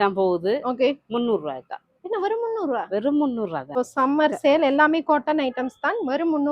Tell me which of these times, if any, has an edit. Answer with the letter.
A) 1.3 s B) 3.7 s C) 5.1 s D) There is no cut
B